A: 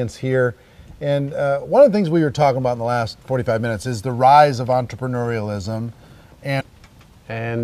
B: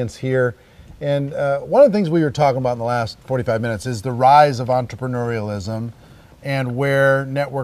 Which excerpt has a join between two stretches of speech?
B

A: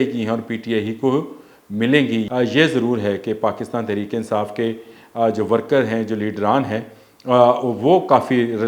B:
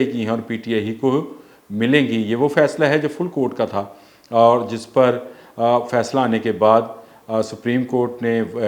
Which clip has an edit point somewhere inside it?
A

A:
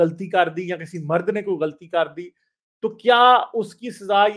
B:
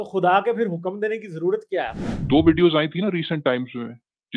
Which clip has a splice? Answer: B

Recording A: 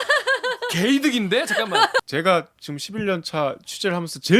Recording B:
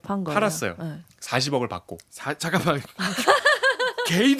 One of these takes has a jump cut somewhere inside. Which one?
A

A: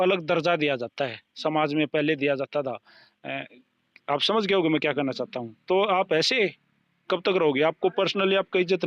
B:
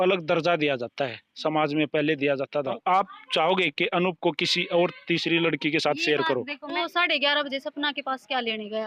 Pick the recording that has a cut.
B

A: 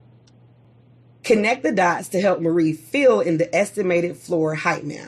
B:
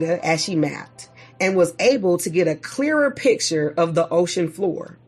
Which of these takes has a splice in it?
A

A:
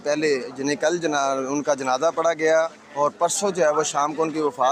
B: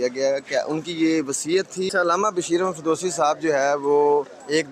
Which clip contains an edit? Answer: B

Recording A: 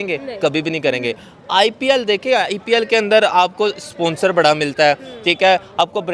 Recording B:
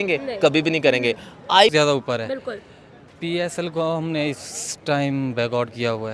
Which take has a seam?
B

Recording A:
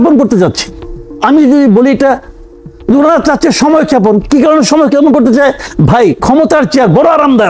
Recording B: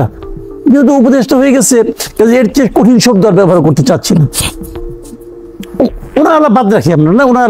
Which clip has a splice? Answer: B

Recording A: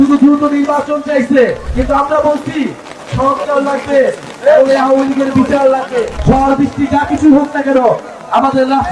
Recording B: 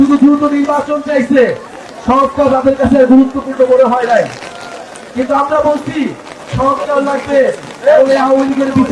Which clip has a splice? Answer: A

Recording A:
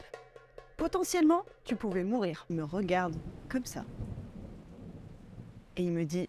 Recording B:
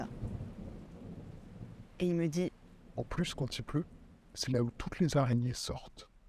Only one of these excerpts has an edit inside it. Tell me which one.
A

